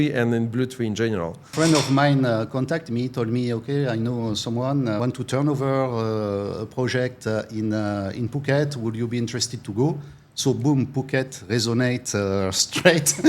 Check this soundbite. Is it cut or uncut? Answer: cut